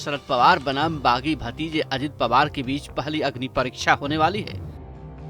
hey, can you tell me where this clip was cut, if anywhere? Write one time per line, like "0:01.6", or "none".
none